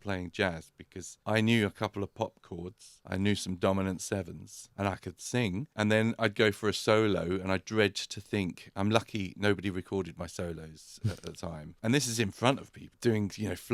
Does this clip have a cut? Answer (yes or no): no